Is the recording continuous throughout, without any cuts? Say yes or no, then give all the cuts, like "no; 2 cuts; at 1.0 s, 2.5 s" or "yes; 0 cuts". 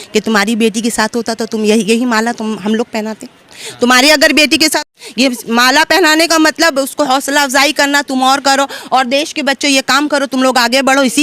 yes; 0 cuts